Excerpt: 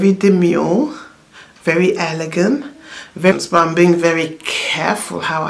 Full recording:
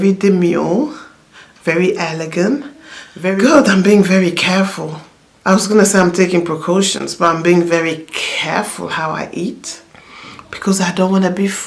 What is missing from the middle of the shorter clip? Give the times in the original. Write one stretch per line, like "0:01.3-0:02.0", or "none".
0:03.4-0:07.0